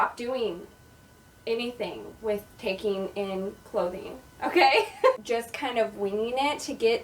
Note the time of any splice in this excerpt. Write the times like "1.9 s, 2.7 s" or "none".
5.2 s